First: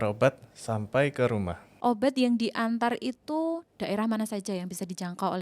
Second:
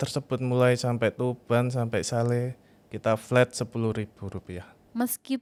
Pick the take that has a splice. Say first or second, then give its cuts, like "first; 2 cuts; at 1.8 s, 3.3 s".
first; 1 cut; at 1.6 s